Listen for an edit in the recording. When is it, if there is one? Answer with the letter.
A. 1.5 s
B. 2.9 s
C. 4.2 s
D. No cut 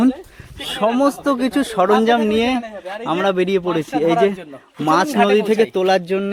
D